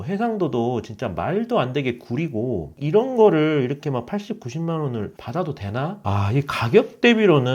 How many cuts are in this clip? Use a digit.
2